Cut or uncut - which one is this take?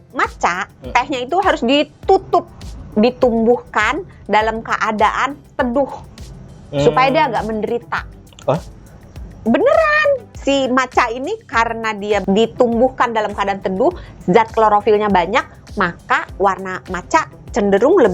cut